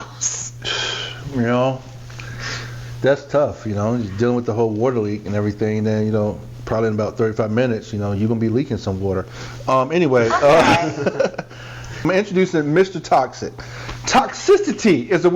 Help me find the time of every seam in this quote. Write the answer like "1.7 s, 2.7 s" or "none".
12.0 s